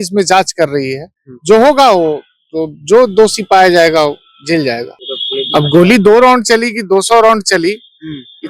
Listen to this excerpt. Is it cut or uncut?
cut